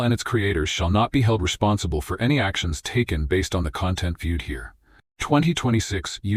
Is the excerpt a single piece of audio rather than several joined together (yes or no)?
yes